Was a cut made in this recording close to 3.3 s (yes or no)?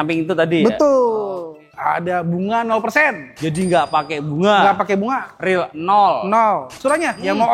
no